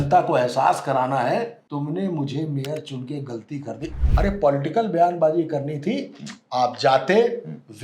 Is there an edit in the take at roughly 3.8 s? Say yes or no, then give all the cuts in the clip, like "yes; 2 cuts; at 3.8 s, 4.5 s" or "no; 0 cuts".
yes; 2 cuts; at 1.6 s, 3.8 s